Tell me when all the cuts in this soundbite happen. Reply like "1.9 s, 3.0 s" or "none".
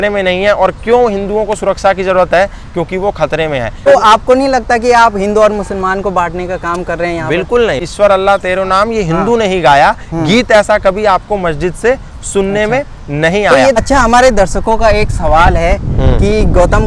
3.8 s, 7.8 s, 13.7 s